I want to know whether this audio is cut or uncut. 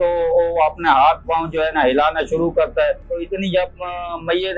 cut